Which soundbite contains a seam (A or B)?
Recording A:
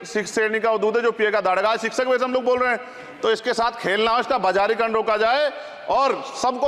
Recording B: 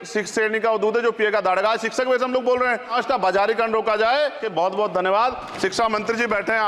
B